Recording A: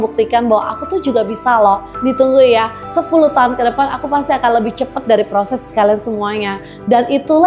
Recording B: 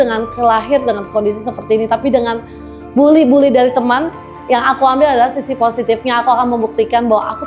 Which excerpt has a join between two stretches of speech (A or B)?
A